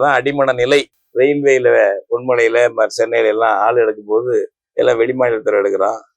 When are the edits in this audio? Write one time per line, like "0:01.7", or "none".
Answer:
0:01.0